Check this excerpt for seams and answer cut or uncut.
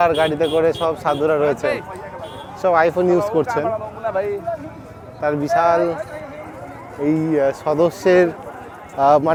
uncut